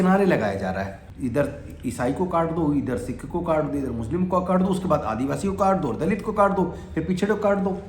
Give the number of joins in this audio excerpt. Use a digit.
1